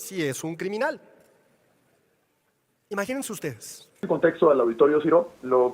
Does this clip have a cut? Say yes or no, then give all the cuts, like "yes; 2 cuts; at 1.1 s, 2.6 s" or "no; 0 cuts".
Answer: yes; 1 cut; at 4.0 s